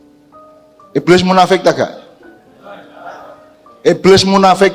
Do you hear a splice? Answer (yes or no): yes